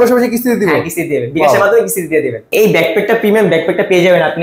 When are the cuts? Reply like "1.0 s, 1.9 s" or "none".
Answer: 2.4 s